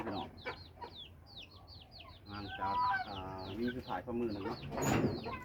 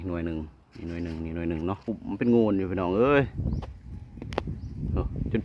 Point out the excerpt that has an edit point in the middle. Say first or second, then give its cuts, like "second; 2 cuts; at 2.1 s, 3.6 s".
second; 1 cut; at 1.8 s